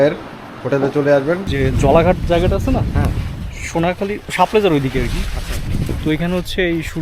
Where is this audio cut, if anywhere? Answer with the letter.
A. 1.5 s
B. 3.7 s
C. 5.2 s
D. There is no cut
A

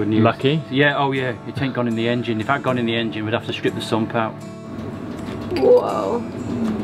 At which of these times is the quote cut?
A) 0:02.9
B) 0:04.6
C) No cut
B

